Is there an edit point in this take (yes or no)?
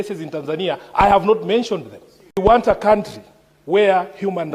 yes